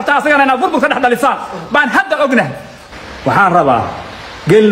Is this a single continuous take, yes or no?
no